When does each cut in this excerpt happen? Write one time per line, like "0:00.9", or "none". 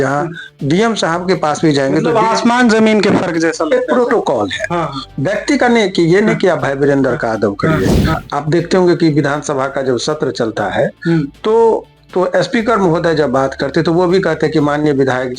0:08.2